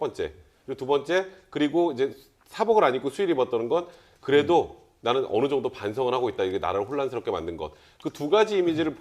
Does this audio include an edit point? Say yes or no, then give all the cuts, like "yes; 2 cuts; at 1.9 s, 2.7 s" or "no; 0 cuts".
yes; 1 cut; at 6.0 s